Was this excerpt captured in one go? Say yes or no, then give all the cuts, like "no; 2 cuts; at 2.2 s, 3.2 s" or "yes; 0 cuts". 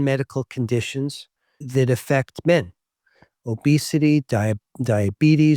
yes; 0 cuts